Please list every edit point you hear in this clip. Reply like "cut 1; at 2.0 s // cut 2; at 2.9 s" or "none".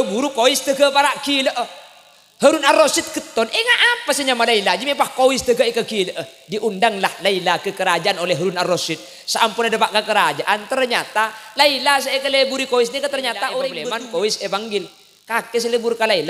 cut 1; at 13.7 s